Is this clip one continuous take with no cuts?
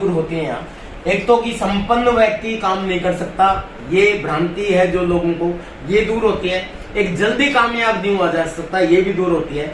yes; 0 cuts

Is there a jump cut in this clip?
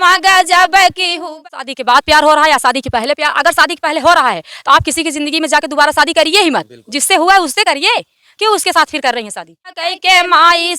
yes; 2 cuts; at 1.4 s, 9.8 s

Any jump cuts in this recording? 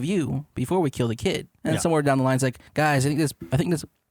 yes; 2 cuts; at 1.5 s, 2.6 s

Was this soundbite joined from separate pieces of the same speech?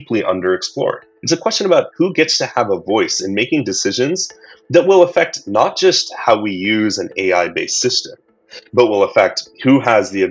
yes; 1 cut; at 1.1 s

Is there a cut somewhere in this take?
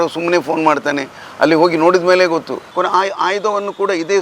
yes; 1 cut; at 2.7 s

